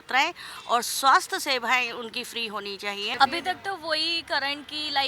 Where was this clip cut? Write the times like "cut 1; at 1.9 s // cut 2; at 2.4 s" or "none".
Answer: cut 1; at 3.1 s